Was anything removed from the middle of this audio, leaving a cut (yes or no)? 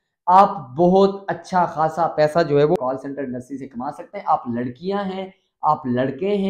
yes